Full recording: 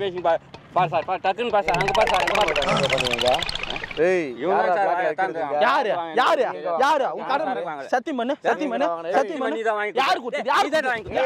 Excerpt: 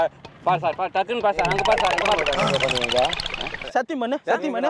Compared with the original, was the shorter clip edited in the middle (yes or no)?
yes